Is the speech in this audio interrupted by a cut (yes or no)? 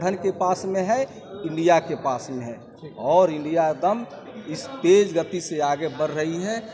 no